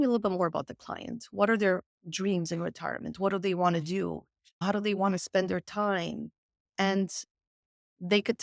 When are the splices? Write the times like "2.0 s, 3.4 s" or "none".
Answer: none